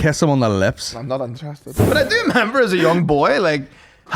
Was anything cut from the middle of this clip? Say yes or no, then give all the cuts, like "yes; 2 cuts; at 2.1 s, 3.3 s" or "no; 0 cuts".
yes; 1 cut; at 1.8 s